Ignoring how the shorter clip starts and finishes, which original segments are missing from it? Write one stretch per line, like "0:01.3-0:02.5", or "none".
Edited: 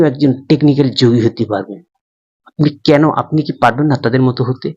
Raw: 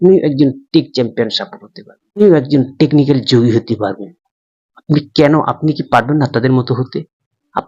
none